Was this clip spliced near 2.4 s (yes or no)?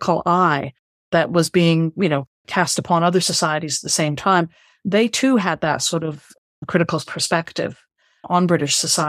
no